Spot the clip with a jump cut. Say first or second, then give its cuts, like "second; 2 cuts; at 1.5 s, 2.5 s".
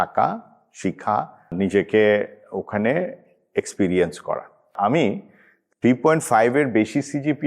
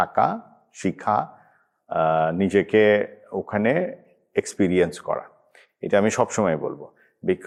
first; 2 cuts; at 1.5 s, 4.7 s